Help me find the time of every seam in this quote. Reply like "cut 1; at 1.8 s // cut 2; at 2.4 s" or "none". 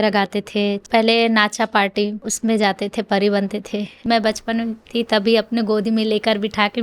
cut 1; at 0.8 s // cut 2; at 2.2 s // cut 3; at 4.0 s